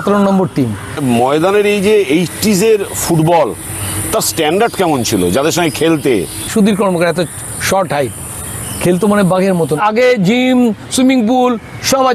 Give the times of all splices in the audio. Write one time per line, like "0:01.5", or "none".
0:01.0
0:06.5
0:09.8